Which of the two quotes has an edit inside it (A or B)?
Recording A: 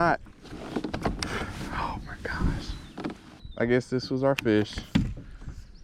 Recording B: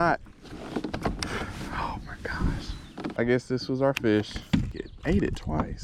B